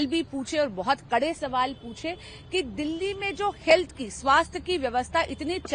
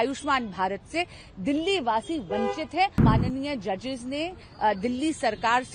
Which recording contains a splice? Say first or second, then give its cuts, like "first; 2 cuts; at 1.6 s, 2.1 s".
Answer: second; 1 cut; at 3.0 s